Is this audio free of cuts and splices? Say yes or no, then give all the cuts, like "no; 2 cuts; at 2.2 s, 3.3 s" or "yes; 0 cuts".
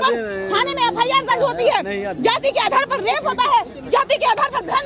yes; 0 cuts